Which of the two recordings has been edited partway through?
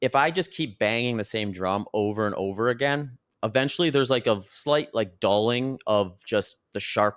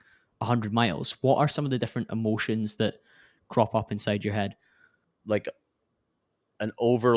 second; 1 cut; at 5.1 s

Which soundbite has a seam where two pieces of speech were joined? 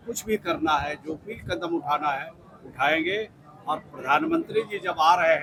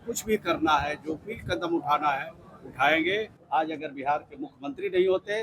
second; 1 cut; at 3.4 s

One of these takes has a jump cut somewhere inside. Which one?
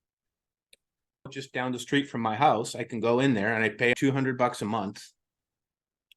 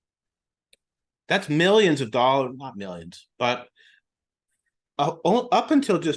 first; 2 cuts; at 1.2 s, 4.0 s

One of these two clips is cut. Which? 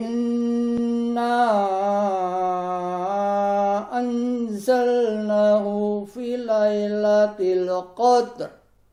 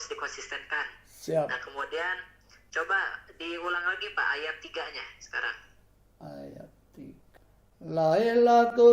second; 1 cut; at 7.3 s

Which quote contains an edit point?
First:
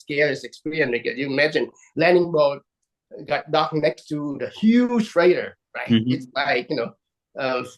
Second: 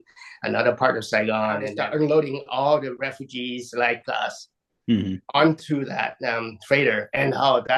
second; 1 cut; at 1.7 s

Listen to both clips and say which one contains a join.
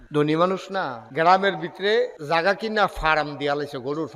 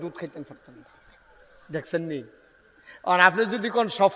first; 2 cuts; at 1.0 s, 2.2 s

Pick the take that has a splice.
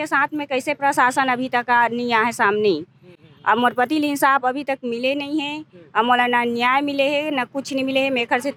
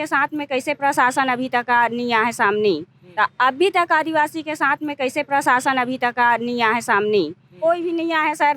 second; 2 cuts; at 3.0 s, 7.6 s

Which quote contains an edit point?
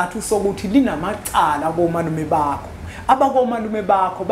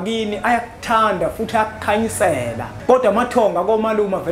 second; 1 cut; at 2.7 s

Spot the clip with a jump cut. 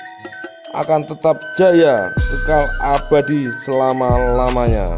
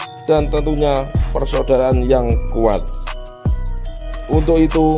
second; 1 cut; at 4.0 s

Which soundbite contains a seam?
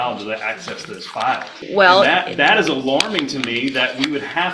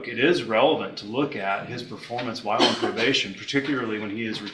first; 1 cut; at 1.5 s

